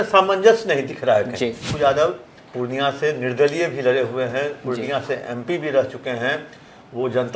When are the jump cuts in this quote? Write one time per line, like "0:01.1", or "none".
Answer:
0:01.7